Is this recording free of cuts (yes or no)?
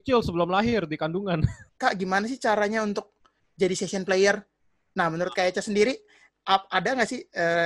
no